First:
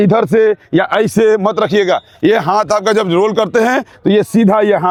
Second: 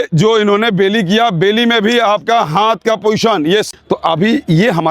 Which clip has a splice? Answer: second; 1 cut; at 3.7 s

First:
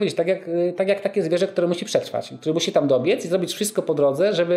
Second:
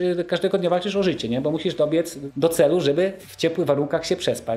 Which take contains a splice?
second; 2 cuts; at 2.2 s, 3.2 s

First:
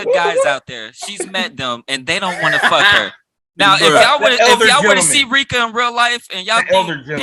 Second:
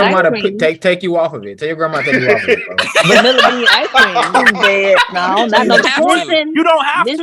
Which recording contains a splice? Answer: second; 1 cut; at 5.8 s

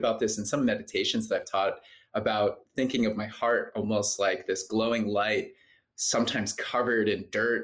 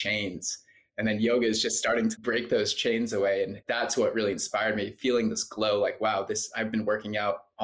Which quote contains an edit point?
second; 2 cuts; at 2.1 s, 3.6 s

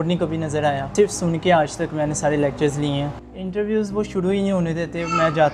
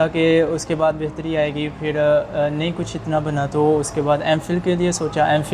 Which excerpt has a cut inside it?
first; 2 cuts; at 0.9 s, 3.1 s

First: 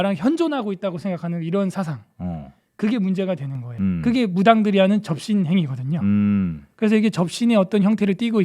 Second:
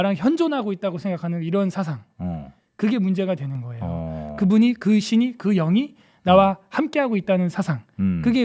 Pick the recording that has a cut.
first; 1 cut; at 3.6 s

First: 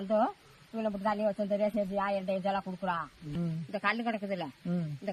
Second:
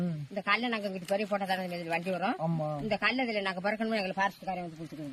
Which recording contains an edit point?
first; 1 cut; at 3.3 s

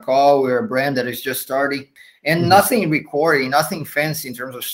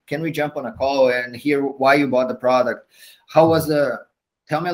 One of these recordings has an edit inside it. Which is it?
first; 1 cut; at 1.9 s

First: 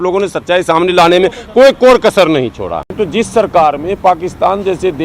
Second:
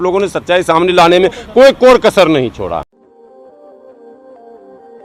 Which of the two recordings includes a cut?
first; 1 cut; at 2.9 s

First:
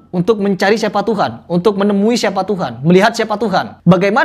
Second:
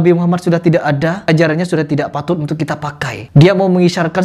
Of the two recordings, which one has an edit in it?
second; 1 cut; at 1.3 s

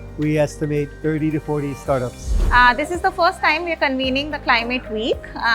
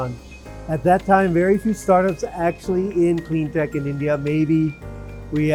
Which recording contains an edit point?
first; 1 cut; at 2.6 s

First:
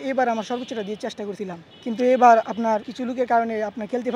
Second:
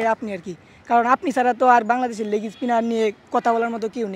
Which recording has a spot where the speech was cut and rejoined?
first; 2 cuts; at 1.7 s, 2.9 s

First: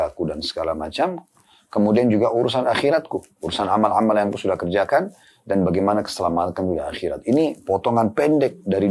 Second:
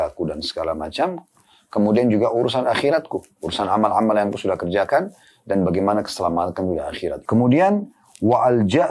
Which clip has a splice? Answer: second; 1 cut; at 7.2 s

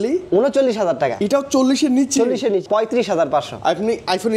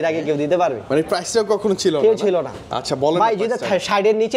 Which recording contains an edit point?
first; 1 cut; at 2.6 s

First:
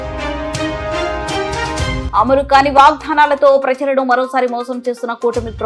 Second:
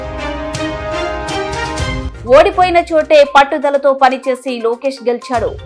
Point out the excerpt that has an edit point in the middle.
second; 1 cut; at 2.0 s

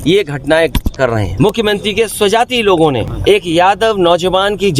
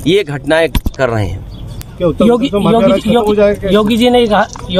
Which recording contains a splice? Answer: first; 2 cuts; at 1.3 s, 3.1 s

